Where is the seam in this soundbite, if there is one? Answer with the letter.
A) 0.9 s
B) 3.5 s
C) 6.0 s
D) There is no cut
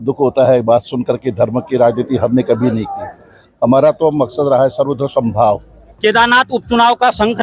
C